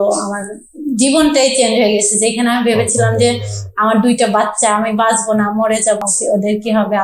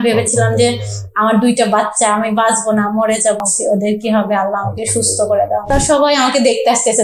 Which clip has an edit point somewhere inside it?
second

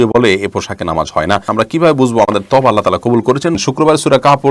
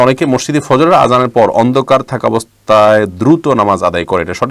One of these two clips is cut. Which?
first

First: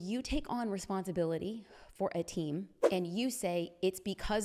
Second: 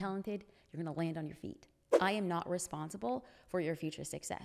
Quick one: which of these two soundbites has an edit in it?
first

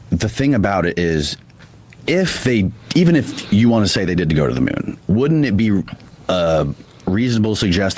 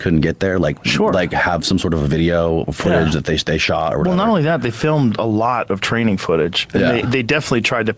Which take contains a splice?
first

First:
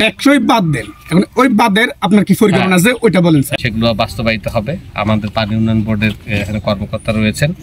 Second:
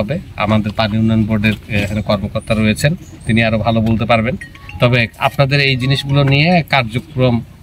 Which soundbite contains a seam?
first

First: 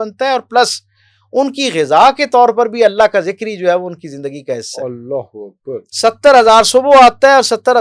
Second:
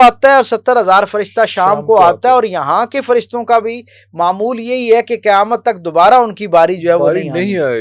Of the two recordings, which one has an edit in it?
first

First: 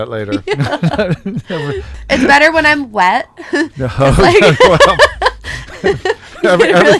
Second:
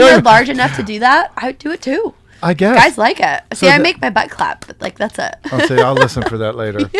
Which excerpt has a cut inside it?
first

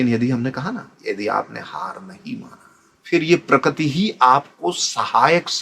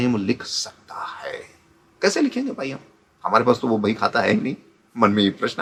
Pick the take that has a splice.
first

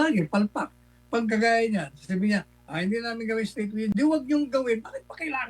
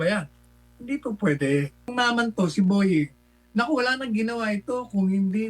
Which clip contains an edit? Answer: second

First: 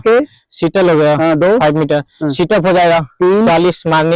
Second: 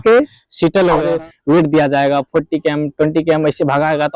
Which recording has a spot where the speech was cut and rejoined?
second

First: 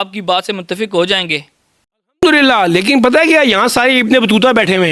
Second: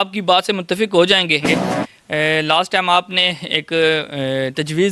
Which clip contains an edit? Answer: second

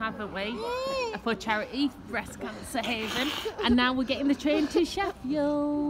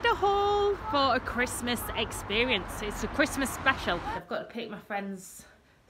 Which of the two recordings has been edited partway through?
second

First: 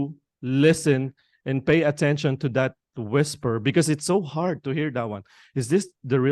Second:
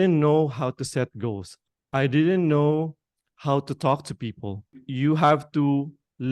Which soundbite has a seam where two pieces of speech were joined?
second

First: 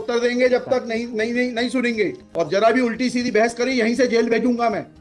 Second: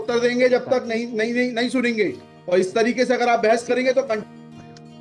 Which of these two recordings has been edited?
first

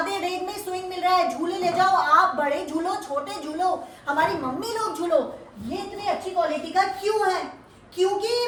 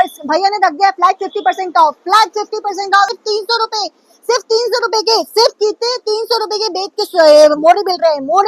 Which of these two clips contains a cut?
second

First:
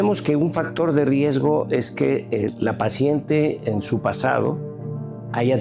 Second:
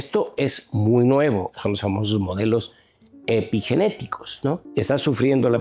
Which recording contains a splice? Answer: second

